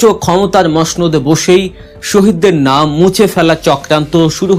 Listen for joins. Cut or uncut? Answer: uncut